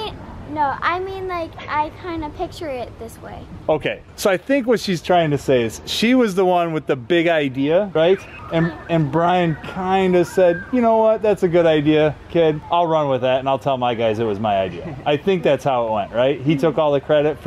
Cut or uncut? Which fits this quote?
uncut